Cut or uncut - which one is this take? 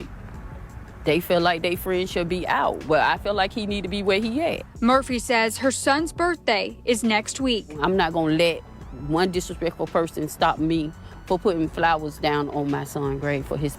uncut